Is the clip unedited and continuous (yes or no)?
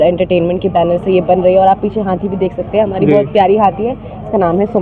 yes